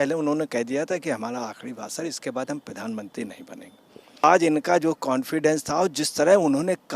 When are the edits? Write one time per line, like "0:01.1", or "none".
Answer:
0:04.2